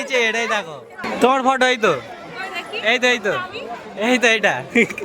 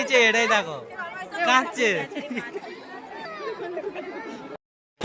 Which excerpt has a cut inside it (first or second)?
first